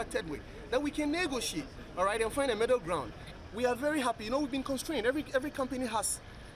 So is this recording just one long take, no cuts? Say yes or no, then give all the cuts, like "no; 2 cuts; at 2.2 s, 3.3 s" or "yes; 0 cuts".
no; 1 cut; at 3.2 s